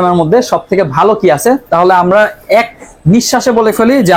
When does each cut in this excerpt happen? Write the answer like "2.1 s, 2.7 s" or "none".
none